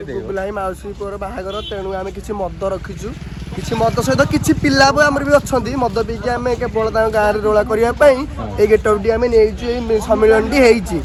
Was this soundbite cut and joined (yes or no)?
no